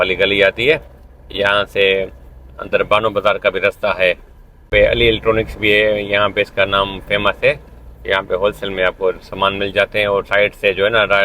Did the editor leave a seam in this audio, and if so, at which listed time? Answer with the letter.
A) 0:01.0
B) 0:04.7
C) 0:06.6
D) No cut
B